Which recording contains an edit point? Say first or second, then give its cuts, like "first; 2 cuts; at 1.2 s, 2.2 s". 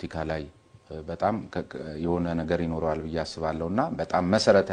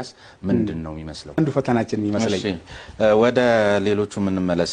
second; 1 cut; at 1.4 s